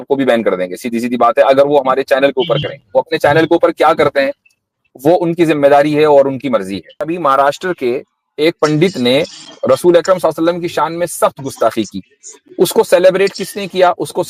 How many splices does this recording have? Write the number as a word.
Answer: one